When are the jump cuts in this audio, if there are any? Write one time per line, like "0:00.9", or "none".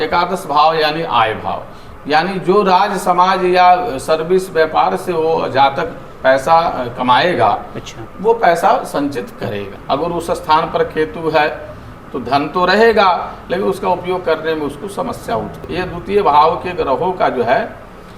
0:09.7
0:15.7